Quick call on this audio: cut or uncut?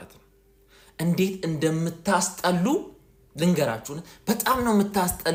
uncut